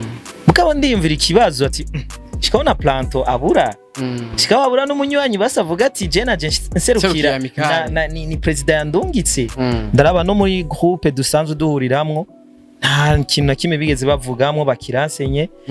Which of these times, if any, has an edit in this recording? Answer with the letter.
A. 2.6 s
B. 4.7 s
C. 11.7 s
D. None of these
D